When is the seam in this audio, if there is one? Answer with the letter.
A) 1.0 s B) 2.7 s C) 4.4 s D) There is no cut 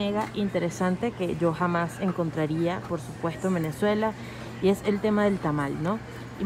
D